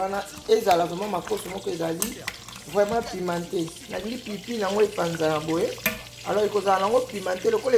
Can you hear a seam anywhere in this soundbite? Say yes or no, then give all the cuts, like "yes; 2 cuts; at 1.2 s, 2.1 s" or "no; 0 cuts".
yes; 1 cut; at 3.8 s